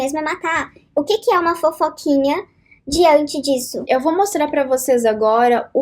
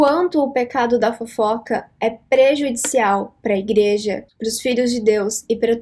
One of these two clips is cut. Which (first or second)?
first